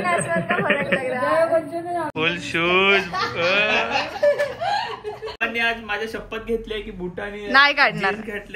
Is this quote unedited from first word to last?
no; 2 cuts; at 2.1 s, 5.4 s

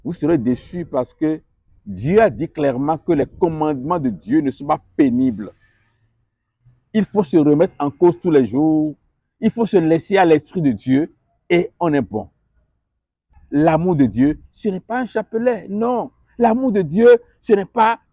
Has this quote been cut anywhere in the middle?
yes; 1 cut; at 13.3 s

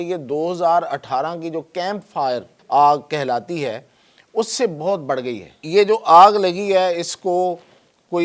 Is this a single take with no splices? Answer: no; 2 cuts; at 2.5 s, 5.6 s

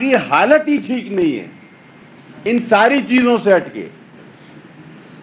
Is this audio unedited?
yes; 0 cuts

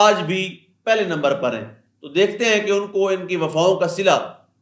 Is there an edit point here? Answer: no; 0 cuts

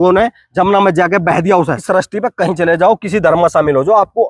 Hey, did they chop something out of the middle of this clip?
yes; 1 cut; at 1.8 s

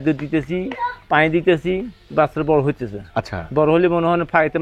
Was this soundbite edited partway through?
no; 0 cuts

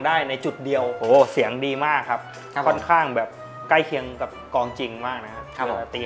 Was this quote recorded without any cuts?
no; 1 cut; at 0.9 s

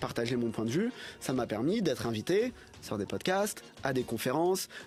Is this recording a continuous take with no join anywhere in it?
yes; 0 cuts

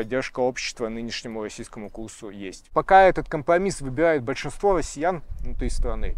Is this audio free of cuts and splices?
no; 1 cut; at 2.7 s

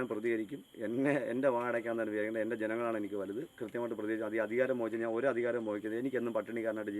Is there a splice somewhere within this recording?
no; 0 cuts

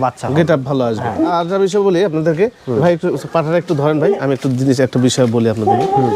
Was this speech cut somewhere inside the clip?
yes; 1 cut; at 1.3 s

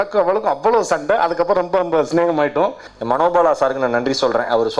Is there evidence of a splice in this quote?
yes; 1 cut; at 2.9 s

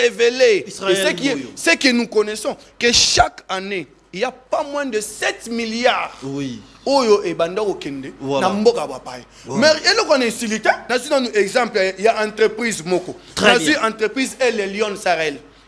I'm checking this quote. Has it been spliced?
yes; 1 cut; at 10.9 s

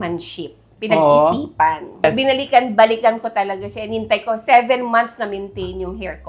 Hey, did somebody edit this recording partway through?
yes; 1 cut; at 2.0 s

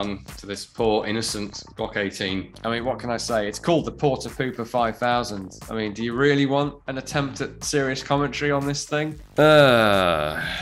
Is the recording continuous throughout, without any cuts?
no; 3 cuts; at 2.5 s, 6.8 s, 9.2 s

